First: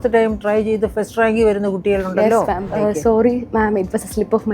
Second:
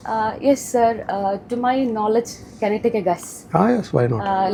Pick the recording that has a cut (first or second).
first